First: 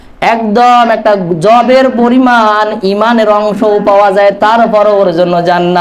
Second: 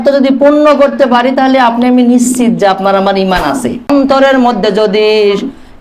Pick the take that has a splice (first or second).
second